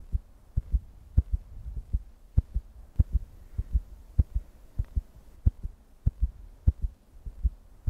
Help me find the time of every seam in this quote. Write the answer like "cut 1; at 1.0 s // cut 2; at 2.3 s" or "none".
cut 1; at 5.0 s